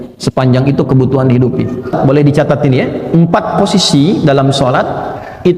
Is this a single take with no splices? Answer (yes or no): no